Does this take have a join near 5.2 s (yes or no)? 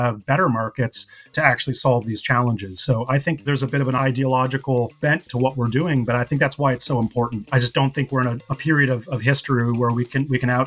no